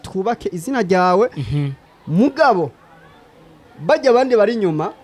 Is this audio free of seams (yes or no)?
yes